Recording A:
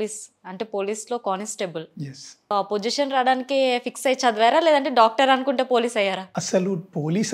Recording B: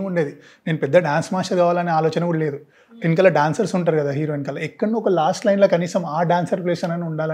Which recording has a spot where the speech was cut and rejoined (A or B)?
A